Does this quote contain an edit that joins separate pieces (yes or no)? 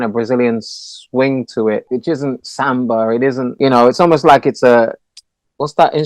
yes